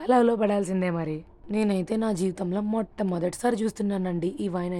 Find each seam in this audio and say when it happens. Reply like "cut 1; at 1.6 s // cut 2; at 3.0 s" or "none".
cut 1; at 1.2 s